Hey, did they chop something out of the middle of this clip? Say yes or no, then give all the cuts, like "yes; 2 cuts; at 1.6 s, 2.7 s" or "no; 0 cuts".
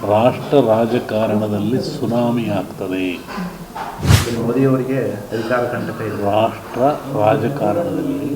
yes; 1 cut; at 4.1 s